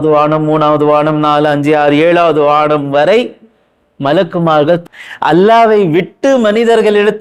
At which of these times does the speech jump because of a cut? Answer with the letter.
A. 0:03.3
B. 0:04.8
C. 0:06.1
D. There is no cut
B